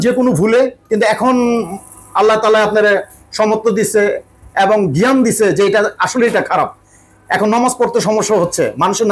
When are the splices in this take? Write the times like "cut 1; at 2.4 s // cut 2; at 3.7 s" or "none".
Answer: none